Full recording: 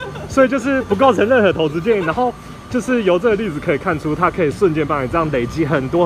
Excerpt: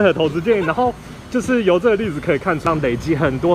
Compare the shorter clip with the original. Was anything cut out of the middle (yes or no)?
yes